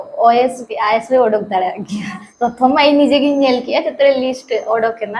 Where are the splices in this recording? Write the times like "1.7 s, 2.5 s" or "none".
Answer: 2.2 s